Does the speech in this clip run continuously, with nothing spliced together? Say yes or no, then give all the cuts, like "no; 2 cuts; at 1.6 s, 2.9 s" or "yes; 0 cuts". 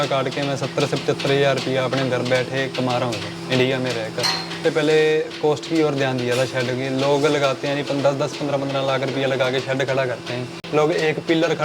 no; 2 cuts; at 4.6 s, 10.5 s